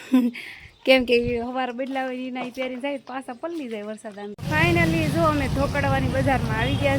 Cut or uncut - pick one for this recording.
cut